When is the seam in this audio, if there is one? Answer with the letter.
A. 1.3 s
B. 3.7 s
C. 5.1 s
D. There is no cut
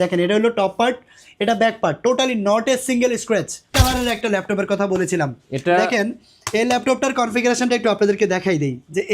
B